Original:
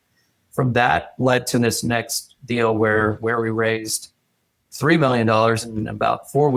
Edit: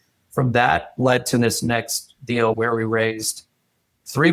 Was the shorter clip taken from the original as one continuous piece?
no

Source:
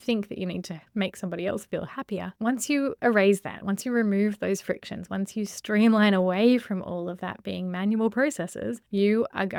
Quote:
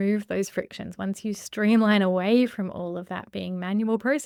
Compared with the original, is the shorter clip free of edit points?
yes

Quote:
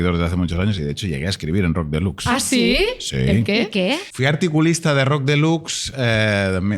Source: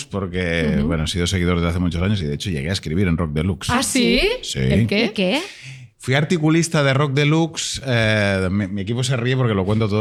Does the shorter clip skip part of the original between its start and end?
yes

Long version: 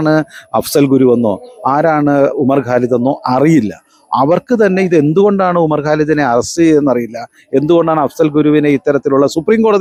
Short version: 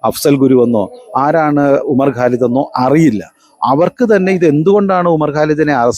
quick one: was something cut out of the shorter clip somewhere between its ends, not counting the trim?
no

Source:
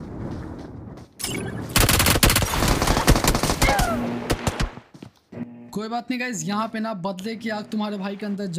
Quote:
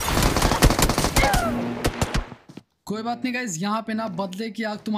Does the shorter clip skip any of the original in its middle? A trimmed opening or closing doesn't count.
yes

